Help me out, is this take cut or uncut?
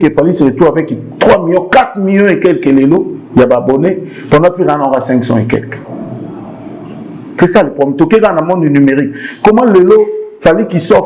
uncut